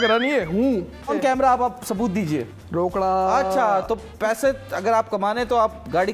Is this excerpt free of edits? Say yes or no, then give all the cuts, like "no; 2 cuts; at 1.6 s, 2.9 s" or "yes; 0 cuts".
no; 2 cuts; at 1.1 s, 2.5 s